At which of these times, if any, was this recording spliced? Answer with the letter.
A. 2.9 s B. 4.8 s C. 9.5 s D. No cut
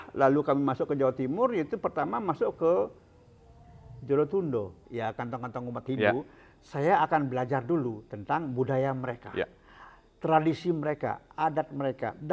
B